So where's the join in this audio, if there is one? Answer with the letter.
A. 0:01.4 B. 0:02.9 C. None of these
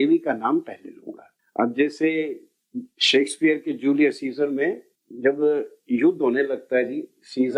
C